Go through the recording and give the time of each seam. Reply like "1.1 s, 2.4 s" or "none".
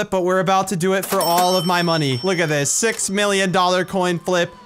2.2 s